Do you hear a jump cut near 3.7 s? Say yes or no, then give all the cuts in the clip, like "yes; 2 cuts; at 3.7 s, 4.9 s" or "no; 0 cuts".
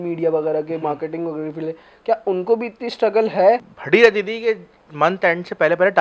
yes; 1 cut; at 3.7 s